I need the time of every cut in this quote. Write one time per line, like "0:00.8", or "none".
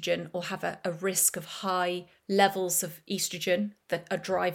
0:02.1